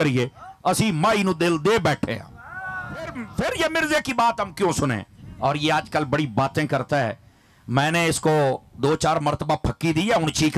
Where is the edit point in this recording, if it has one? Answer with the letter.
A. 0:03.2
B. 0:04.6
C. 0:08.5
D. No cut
A